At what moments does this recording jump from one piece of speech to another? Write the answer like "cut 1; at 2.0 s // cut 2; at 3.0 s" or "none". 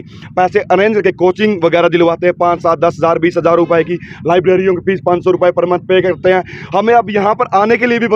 none